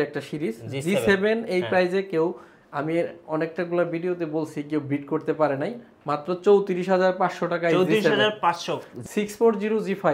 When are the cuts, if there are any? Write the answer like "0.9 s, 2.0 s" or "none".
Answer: 8.9 s